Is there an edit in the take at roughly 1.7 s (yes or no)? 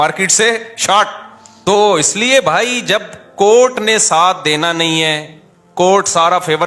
yes